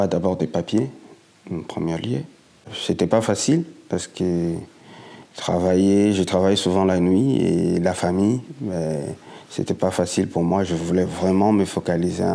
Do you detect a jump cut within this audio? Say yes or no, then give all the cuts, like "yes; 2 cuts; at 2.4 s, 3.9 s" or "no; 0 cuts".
yes; 1 cut; at 2.7 s